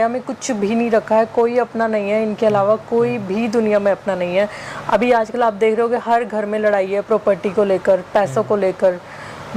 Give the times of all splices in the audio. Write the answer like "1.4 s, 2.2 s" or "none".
none